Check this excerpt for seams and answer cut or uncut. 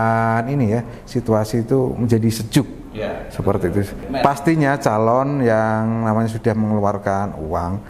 cut